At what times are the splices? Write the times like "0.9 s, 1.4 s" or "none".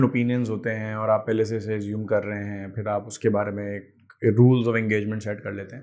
none